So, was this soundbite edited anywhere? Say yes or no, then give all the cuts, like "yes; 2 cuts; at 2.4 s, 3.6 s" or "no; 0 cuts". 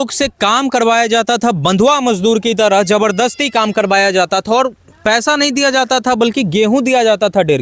no; 0 cuts